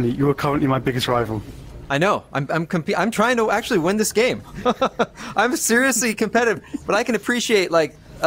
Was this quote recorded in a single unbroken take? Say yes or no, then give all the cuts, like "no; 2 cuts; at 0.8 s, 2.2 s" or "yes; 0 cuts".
yes; 0 cuts